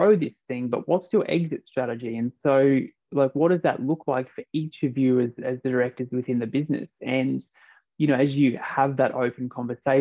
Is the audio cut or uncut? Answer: uncut